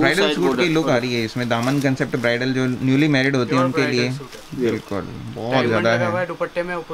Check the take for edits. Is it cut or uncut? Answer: uncut